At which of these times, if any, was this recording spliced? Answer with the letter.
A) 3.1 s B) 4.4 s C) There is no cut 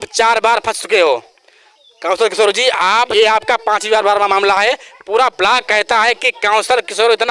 A